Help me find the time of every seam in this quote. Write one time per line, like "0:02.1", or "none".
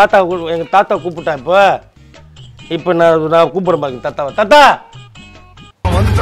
none

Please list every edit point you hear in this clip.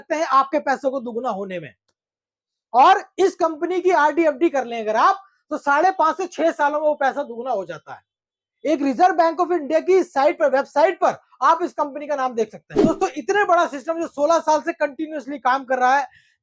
0:12.7

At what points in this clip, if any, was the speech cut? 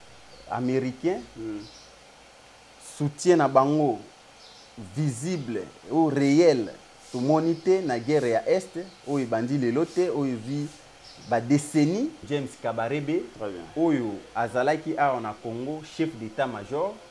0:12.2

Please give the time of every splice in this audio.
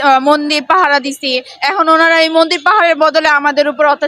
none

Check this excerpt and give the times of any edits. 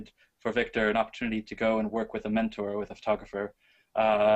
0:01.5

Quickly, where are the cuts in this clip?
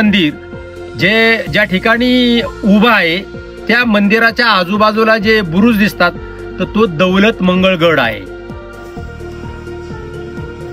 0:08.2

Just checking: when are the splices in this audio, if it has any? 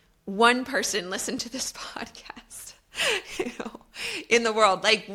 none

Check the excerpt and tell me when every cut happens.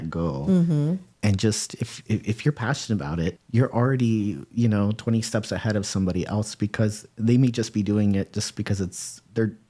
0:03.4

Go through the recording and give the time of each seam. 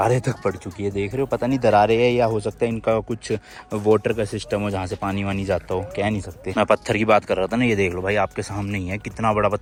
none

